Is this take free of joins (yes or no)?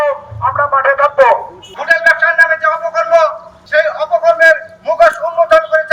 no